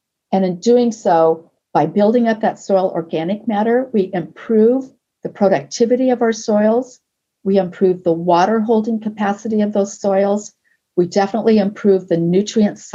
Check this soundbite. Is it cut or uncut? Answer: uncut